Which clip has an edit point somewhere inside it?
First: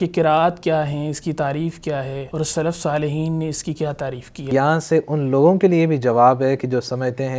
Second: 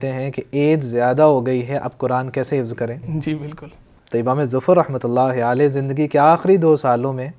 first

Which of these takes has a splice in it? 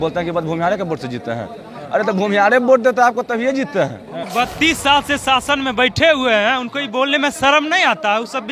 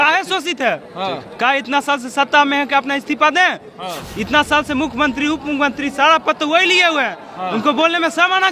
first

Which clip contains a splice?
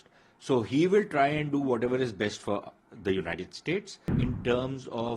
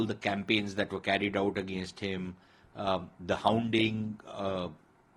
first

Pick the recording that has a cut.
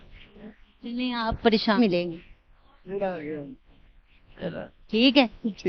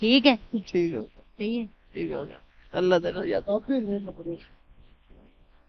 first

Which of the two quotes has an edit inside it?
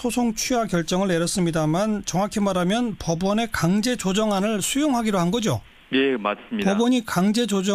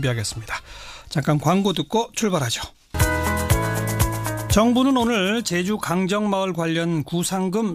second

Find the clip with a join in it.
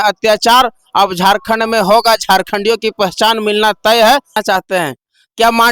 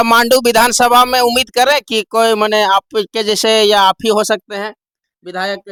first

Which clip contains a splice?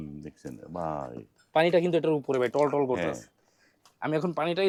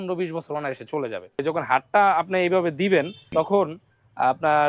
second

